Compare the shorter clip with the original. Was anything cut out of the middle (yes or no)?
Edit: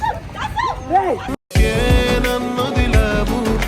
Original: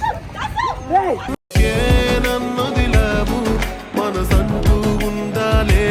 no